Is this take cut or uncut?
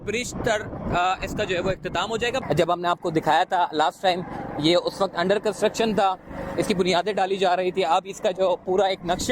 cut